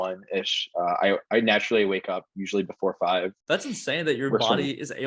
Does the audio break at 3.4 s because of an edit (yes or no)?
yes